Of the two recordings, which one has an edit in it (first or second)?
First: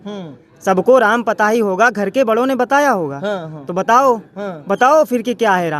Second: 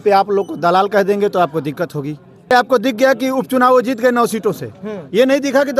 second